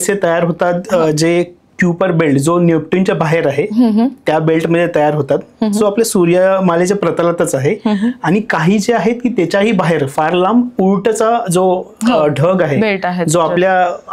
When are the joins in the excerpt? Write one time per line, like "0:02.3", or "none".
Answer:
none